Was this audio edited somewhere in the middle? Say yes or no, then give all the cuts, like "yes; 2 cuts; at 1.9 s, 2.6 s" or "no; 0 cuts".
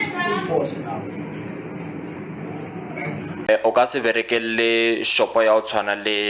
yes; 1 cut; at 3.5 s